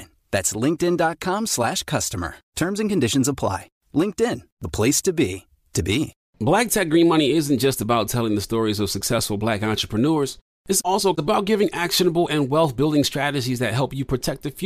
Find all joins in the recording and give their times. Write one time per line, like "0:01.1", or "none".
0:06.2